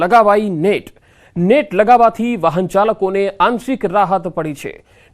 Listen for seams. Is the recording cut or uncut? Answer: uncut